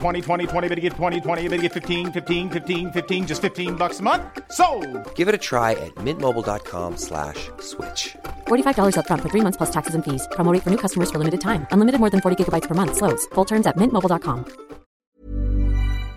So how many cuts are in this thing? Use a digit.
1